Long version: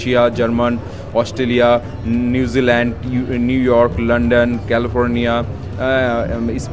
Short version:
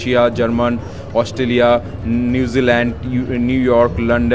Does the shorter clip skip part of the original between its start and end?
no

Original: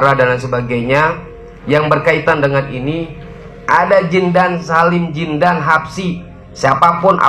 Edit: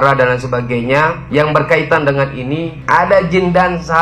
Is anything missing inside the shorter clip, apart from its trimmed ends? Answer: yes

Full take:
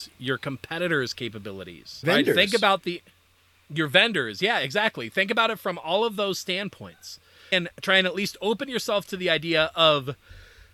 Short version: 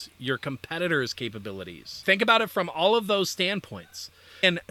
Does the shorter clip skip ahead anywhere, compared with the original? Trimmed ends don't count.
yes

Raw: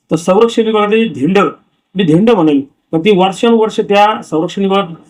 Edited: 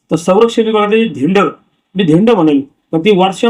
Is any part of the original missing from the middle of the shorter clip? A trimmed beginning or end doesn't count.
no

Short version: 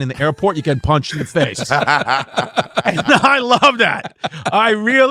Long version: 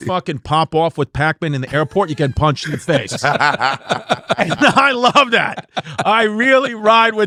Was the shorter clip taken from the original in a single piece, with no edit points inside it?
yes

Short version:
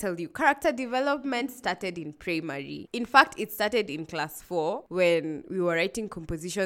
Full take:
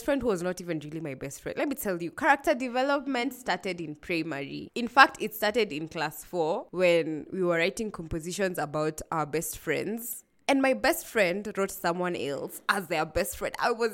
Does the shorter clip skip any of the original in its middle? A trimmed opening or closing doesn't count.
no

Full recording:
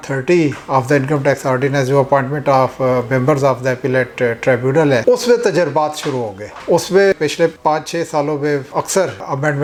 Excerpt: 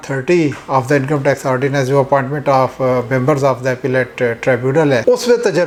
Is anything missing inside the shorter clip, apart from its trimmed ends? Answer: no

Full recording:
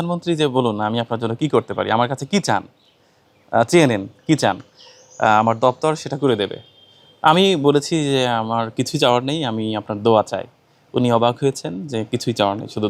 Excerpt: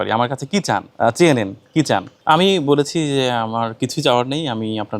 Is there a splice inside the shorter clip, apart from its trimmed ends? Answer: yes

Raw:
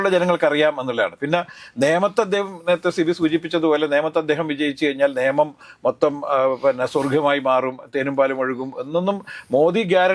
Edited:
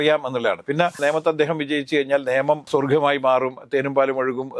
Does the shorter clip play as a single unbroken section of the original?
no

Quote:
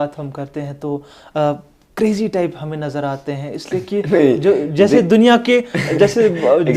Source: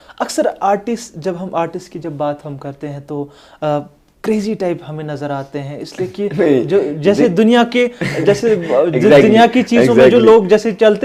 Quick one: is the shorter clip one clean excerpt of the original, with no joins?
yes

